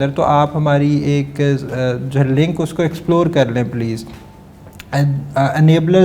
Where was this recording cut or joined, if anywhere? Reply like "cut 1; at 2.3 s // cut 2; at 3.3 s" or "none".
none